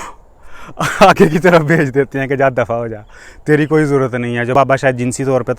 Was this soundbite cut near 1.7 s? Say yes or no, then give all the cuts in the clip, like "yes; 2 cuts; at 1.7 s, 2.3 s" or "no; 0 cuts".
no; 1 cut; at 4.5 s